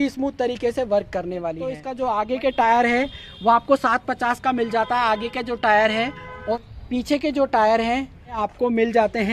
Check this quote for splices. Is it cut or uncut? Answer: cut